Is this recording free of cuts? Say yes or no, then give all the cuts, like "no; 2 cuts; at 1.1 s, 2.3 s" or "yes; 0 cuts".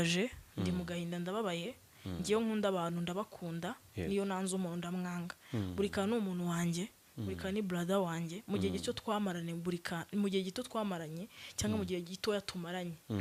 yes; 0 cuts